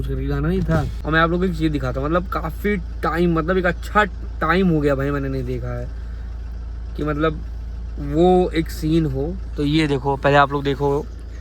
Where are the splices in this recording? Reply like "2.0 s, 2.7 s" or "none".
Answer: 0.9 s